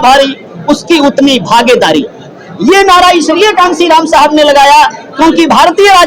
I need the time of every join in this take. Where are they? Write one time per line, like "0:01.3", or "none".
none